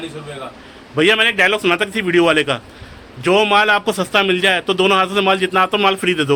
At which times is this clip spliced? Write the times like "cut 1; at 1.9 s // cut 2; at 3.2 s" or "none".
none